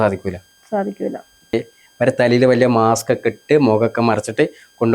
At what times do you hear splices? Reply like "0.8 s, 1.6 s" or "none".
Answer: 1.5 s